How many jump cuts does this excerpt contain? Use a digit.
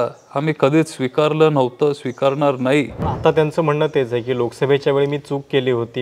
1